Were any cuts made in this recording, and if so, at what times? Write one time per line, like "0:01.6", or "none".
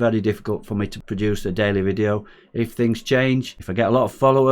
0:01.0
0:03.6